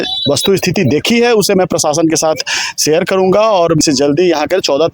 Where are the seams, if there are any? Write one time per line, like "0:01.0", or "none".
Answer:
0:03.8